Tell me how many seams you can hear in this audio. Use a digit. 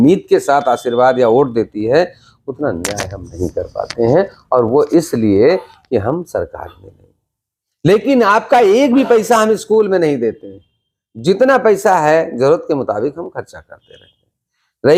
0